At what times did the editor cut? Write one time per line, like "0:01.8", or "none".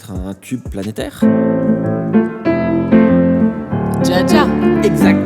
0:01.2